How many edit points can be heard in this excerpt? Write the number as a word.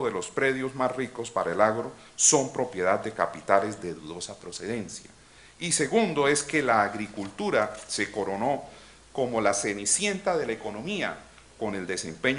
one